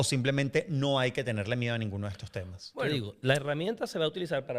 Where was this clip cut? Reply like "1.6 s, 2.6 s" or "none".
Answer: 2.9 s